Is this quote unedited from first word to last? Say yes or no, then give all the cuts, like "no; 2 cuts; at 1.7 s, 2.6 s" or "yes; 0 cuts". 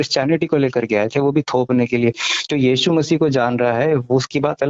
yes; 0 cuts